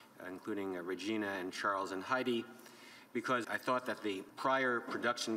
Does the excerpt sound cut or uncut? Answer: cut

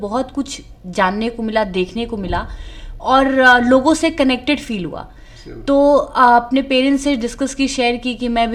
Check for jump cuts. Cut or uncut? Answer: uncut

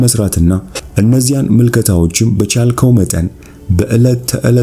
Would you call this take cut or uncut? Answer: uncut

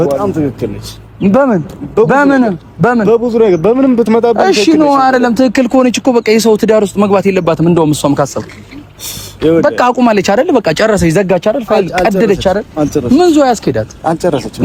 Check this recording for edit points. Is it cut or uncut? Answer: uncut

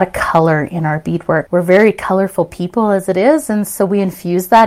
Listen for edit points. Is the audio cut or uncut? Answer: cut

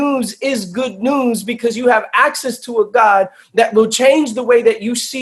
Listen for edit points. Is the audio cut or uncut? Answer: uncut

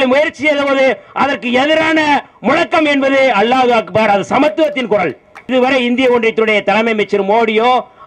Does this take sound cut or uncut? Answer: cut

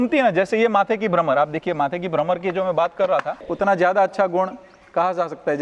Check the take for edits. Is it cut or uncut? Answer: cut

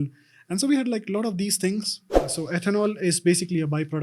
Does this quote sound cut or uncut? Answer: cut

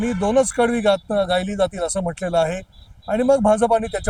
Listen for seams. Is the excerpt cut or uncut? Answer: uncut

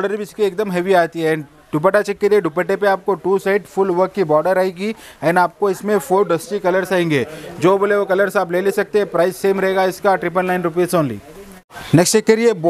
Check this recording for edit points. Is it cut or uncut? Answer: uncut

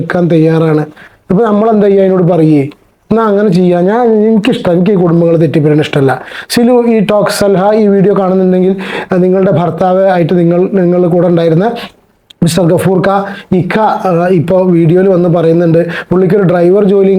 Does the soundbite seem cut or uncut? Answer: uncut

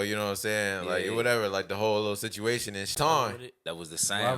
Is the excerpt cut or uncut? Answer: cut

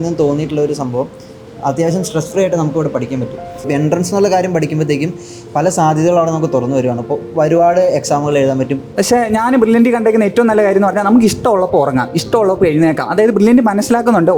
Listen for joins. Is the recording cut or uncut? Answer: cut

